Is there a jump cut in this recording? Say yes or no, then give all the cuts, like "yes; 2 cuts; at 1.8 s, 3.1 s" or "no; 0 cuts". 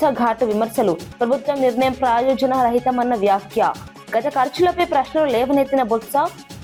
no; 0 cuts